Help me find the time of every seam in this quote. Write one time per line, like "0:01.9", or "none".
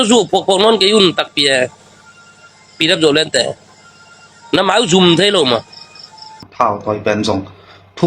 0:06.5